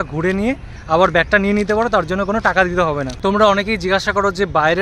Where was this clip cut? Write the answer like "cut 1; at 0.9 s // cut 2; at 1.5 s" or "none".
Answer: cut 1; at 3.1 s